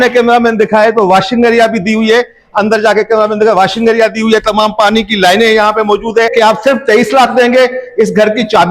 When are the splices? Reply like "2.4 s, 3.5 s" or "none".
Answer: 6.3 s